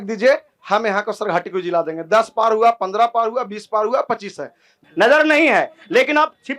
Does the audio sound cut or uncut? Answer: cut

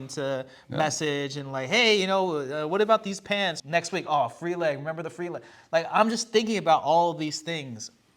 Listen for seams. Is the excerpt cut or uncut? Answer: cut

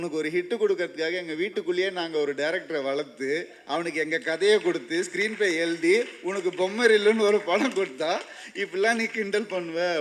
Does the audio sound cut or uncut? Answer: uncut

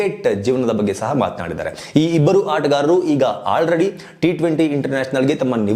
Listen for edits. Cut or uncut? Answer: uncut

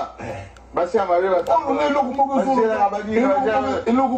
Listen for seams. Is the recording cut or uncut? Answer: uncut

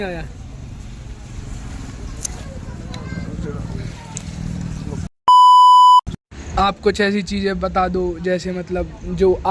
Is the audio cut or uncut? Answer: uncut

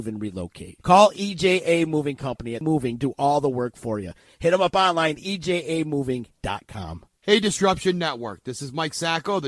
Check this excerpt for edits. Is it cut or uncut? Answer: cut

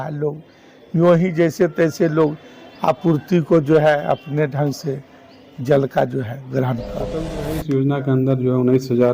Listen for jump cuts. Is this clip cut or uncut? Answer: cut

